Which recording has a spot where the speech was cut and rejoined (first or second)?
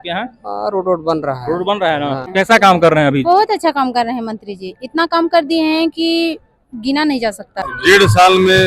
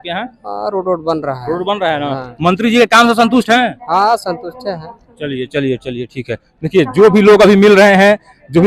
first